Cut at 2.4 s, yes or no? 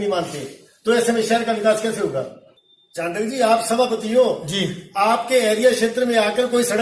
yes